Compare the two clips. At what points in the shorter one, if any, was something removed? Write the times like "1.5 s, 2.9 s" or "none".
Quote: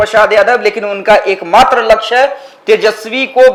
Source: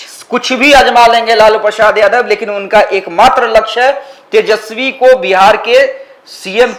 none